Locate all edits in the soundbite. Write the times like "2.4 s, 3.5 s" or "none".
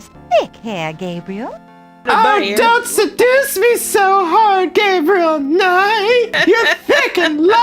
2.0 s, 6.3 s